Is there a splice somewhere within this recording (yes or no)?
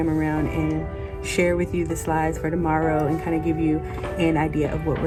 no